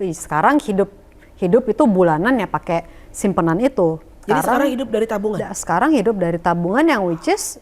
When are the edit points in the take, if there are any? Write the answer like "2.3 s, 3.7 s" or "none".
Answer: 4.2 s